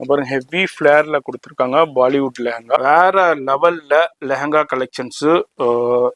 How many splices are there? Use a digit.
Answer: 1